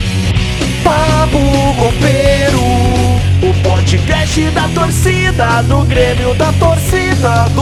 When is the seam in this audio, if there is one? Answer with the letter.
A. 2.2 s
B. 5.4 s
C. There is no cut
C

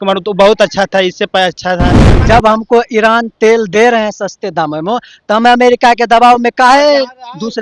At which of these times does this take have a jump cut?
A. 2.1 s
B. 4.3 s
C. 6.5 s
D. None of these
A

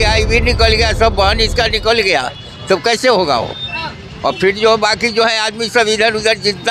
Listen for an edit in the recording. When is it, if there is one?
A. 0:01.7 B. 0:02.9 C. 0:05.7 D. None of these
D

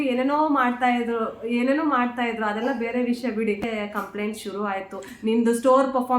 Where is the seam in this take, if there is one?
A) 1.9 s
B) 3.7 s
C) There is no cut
B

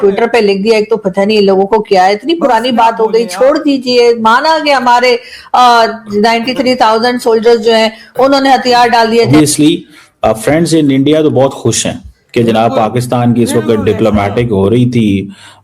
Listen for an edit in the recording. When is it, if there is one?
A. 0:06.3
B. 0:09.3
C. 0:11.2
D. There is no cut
B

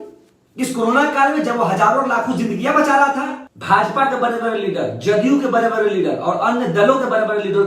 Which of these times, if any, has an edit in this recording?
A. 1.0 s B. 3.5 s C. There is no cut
B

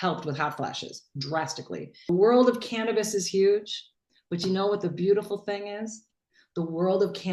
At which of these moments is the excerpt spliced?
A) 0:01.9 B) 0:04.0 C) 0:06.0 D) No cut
A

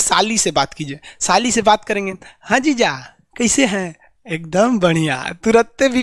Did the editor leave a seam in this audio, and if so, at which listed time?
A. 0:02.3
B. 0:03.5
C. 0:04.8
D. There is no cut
D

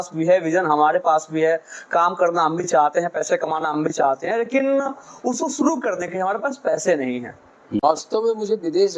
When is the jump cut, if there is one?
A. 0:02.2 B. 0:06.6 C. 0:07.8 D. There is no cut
C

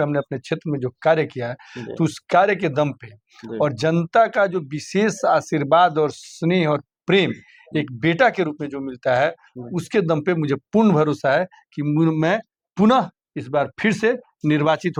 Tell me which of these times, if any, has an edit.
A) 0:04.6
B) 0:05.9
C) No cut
C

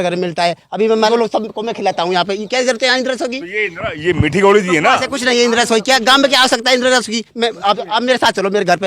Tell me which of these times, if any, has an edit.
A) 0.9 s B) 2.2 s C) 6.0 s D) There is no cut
A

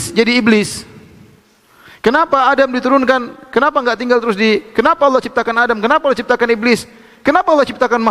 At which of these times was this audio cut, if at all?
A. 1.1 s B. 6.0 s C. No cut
C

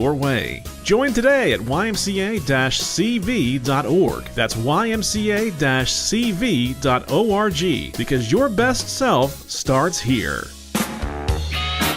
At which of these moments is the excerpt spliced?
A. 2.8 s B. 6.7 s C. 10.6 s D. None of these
C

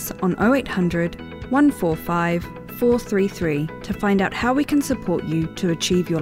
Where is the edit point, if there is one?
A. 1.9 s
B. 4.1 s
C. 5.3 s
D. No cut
D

